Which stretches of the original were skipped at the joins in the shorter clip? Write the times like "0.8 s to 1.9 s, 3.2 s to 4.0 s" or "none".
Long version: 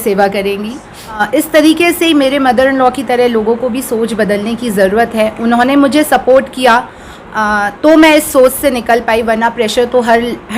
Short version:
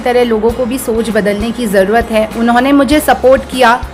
none